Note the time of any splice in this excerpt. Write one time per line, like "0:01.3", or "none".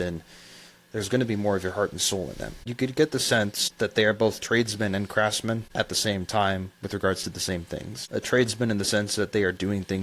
0:02.7
0:03.6
0:05.7
0:07.9